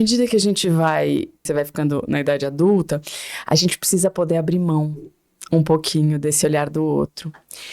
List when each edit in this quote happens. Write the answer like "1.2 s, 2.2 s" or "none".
1.4 s